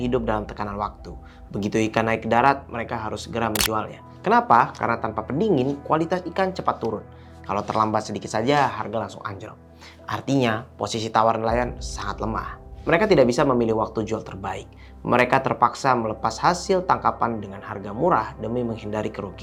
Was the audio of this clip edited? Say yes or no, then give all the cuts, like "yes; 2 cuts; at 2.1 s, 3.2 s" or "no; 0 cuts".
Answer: no; 0 cuts